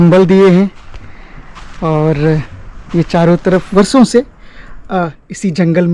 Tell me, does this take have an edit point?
yes; 1 cut; at 3.7 s

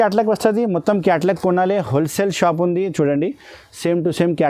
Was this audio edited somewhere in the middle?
no; 0 cuts

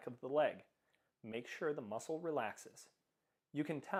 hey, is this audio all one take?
yes; 0 cuts

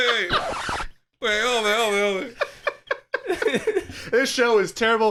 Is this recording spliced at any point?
no; 0 cuts

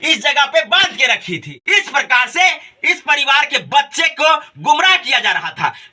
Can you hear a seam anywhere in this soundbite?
no; 0 cuts

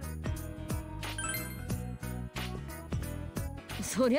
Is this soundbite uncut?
yes; 0 cuts

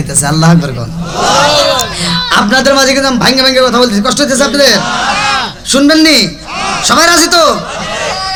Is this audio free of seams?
yes; 0 cuts

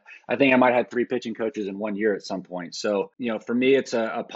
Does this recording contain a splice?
yes; 1 cut; at 3.1 s

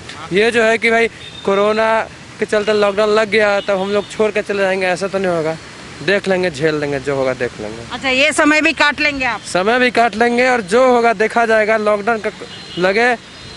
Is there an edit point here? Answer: no; 0 cuts

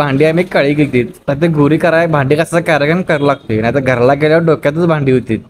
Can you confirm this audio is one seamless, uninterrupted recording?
yes; 0 cuts

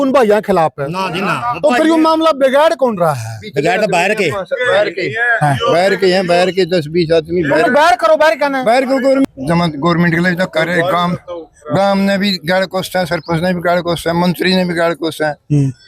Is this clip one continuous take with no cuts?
no; 1 cut; at 9.2 s

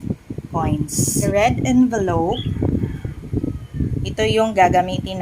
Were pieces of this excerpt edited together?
yes; 1 cut; at 1.3 s

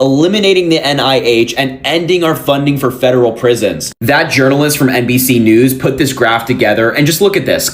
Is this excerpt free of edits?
yes; 0 cuts

